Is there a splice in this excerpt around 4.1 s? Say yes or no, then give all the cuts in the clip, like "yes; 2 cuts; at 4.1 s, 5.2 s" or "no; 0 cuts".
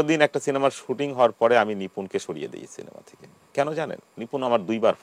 yes; 1 cut; at 4.1 s